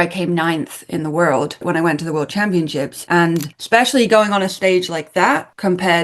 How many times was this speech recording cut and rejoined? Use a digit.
2